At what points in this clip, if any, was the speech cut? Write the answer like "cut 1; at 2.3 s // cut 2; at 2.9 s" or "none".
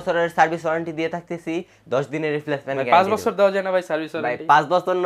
none